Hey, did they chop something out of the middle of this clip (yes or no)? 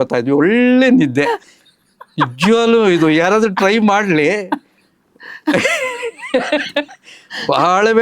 no